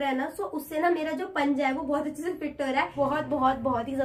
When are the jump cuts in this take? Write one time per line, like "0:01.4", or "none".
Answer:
0:02.9

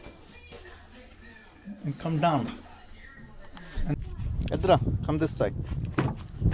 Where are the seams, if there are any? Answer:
none

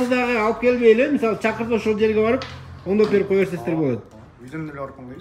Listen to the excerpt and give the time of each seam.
none

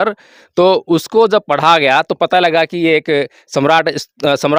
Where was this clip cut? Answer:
none

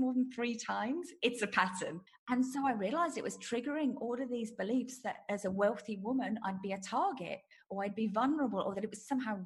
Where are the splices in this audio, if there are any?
0:02.0

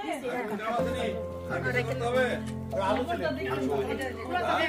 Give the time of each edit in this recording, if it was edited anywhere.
none

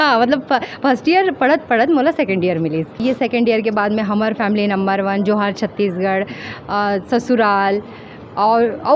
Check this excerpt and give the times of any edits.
0:03.0

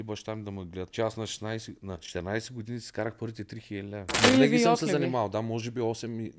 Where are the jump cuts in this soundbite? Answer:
0:00.9
0:02.1
0:04.1

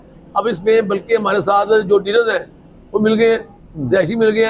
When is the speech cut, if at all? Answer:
none

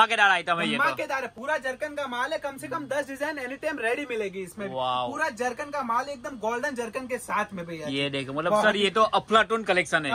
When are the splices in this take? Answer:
none

